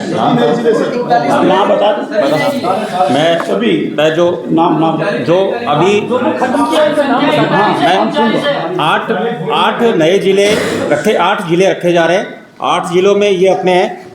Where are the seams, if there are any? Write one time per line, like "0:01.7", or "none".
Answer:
none